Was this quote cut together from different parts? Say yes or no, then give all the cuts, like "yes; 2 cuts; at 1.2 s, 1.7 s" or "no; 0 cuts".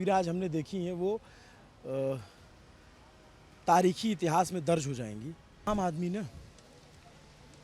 yes; 1 cut; at 5.7 s